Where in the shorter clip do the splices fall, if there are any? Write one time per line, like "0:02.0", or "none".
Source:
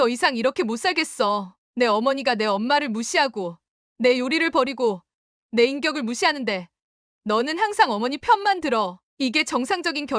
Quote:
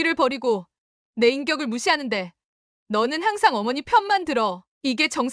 none